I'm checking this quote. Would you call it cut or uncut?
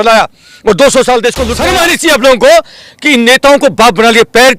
cut